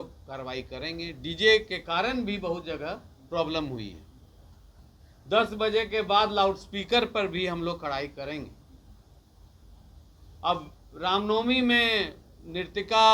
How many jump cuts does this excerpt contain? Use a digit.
0